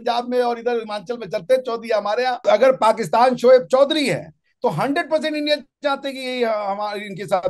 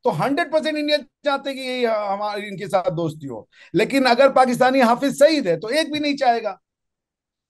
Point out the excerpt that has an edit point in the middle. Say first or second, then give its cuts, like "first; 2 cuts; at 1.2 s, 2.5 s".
first; 1 cut; at 2.5 s